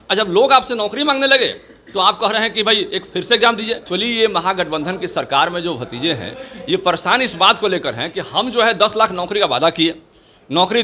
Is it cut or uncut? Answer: cut